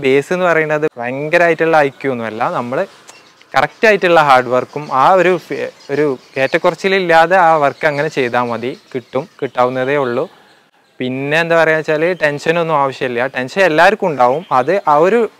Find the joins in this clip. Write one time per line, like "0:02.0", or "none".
none